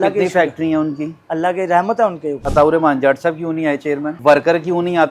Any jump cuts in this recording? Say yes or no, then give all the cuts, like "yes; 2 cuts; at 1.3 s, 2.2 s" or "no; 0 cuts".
yes; 2 cuts; at 2.4 s, 4.1 s